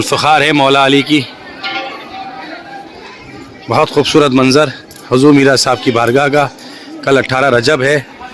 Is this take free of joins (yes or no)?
no